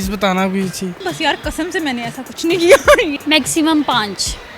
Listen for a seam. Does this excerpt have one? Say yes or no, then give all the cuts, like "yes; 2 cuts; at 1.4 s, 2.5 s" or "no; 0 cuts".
yes; 2 cuts; at 1.0 s, 3.2 s